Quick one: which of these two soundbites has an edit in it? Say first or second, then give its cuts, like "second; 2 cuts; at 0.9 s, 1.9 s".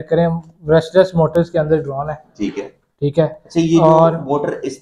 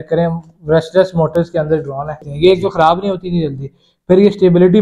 second; 1 cut; at 2.3 s